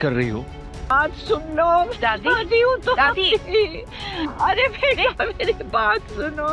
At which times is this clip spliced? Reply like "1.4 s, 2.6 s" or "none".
0.9 s

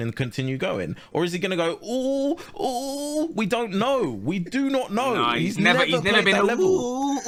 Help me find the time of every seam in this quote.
none

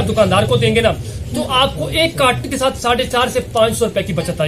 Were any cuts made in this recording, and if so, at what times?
none

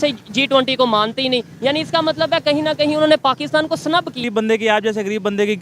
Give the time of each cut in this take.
4.2 s

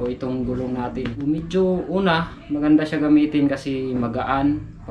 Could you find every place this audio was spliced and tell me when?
1.3 s

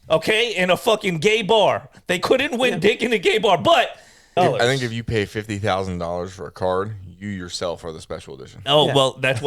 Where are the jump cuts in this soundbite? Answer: 4.4 s

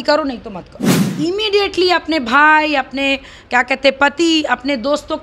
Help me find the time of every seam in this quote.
1.0 s

